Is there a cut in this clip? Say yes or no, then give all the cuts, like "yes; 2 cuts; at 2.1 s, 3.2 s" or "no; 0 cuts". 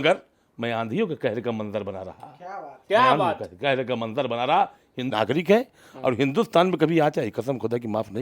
yes; 1 cut; at 5.1 s